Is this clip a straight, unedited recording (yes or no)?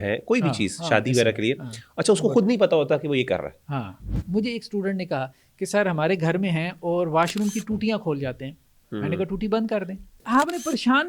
no